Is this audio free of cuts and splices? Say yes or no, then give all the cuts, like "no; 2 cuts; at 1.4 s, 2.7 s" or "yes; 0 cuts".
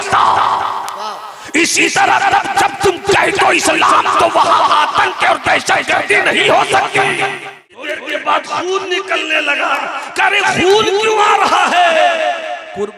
no; 1 cut; at 8.0 s